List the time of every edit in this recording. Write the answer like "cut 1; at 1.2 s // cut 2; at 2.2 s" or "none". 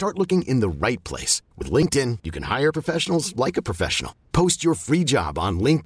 none